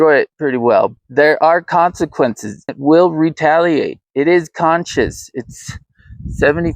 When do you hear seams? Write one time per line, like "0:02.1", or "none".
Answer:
0:01.0
0:02.7
0:04.0